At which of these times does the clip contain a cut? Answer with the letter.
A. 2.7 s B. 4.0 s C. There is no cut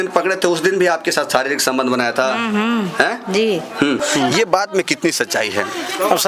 B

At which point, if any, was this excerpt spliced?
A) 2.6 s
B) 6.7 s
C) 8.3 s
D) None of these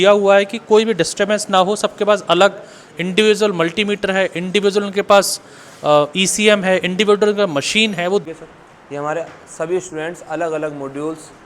C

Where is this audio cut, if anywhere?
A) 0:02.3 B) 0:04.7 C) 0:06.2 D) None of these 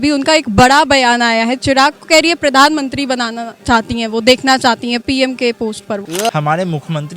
C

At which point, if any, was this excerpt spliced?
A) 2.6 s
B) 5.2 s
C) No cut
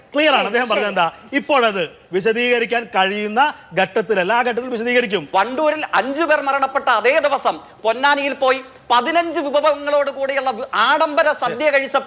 B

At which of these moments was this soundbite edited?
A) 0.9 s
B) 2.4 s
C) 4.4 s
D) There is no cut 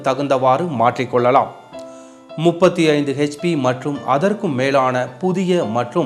C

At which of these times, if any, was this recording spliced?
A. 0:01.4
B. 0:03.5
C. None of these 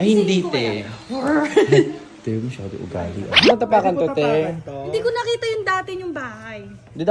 B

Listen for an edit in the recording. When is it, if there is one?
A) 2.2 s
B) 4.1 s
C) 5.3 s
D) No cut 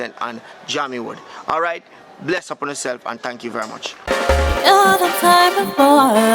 B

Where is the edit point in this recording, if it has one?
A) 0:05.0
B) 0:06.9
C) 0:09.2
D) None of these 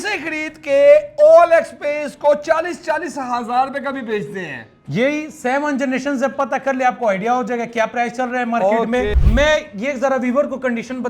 C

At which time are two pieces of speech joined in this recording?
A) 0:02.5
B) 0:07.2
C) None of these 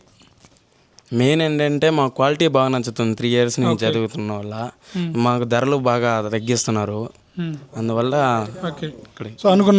C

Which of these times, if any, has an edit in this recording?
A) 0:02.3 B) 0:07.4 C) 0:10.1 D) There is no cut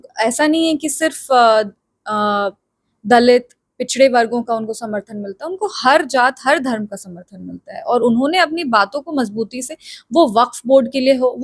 D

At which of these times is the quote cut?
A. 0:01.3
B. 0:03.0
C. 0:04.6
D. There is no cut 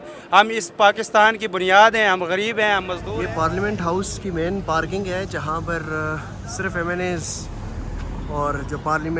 B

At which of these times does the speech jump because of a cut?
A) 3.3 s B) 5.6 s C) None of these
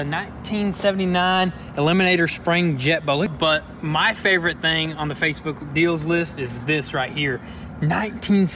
A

